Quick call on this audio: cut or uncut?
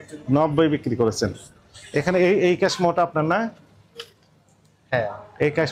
uncut